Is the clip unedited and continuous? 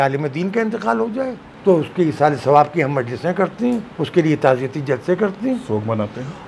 no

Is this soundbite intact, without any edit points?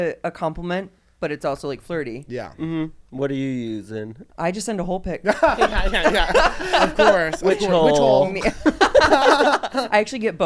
yes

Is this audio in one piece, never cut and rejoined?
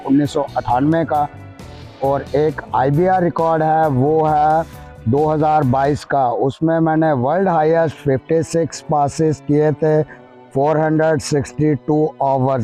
yes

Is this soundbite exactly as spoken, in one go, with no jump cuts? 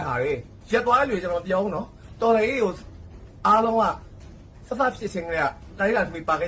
no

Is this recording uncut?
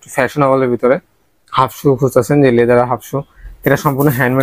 yes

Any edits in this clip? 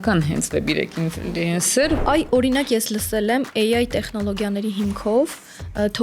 yes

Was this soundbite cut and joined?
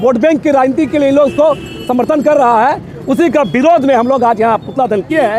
no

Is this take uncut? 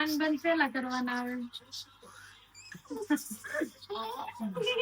yes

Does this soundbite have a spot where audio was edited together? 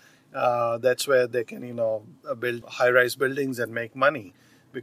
yes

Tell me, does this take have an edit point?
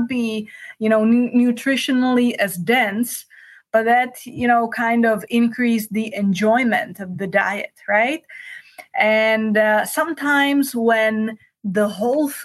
no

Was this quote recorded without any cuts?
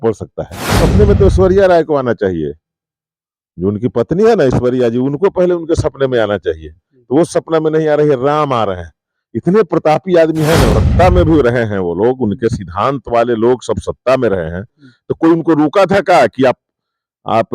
no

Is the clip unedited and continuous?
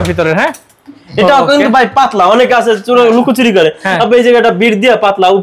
yes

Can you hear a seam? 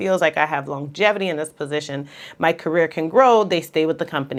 no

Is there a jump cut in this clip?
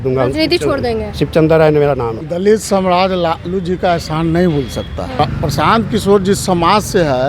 yes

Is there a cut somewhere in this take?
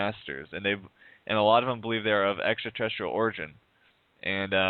no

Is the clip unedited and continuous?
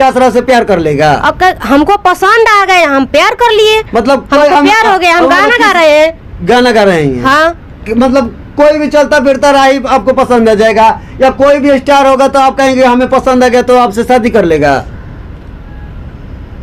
yes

